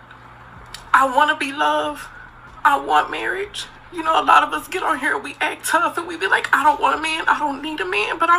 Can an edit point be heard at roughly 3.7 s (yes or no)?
no